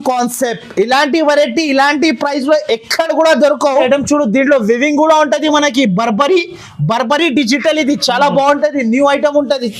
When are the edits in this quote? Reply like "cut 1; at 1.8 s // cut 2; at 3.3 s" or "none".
cut 1; at 3.9 s